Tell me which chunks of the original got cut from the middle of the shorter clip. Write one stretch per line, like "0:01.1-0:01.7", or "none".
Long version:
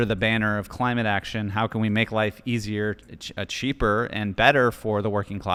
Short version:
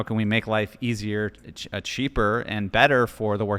none